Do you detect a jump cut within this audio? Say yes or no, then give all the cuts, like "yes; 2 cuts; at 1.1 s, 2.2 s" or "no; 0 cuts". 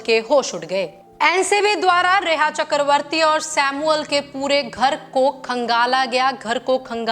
yes; 1 cut; at 1.0 s